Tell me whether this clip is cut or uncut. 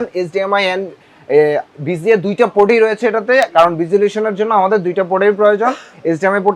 uncut